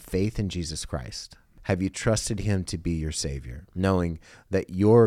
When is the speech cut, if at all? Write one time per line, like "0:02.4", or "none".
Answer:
0:01.5